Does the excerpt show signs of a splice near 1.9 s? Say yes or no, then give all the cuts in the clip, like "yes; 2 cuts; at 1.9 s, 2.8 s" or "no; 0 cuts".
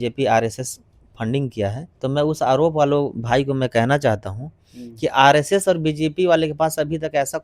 yes; 1 cut; at 1.9 s